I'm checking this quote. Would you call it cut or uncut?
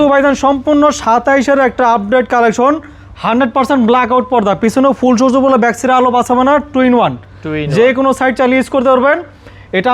uncut